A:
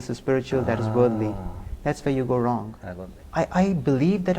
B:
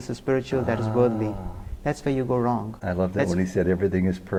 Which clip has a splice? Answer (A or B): A